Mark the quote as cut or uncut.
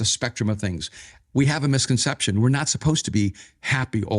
uncut